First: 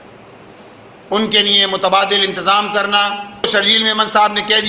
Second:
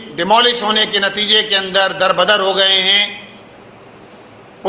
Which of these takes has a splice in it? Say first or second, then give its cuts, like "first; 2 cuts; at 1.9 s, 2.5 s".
first; 1 cut; at 3.4 s